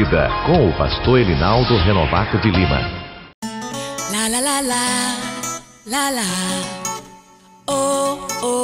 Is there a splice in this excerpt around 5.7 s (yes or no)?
no